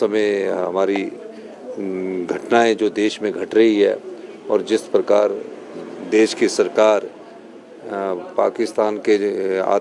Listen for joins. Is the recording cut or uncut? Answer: uncut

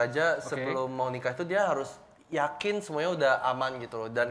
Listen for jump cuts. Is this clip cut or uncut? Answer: uncut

